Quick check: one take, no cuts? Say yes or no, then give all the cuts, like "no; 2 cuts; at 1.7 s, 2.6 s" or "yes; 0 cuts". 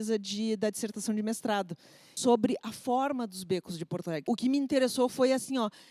no; 2 cuts; at 2.1 s, 4.3 s